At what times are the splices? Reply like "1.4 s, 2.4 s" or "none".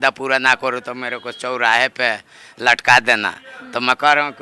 none